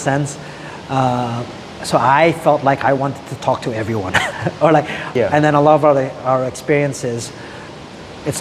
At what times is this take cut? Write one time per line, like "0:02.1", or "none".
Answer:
0:05.0